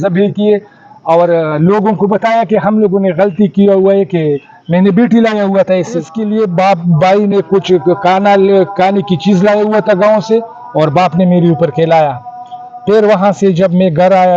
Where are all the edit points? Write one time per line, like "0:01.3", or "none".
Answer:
0:06.1